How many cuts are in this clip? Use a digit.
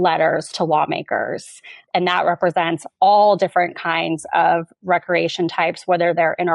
1